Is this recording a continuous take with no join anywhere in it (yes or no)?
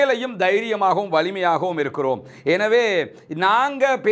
yes